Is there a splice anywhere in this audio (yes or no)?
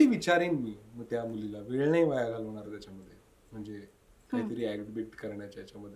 no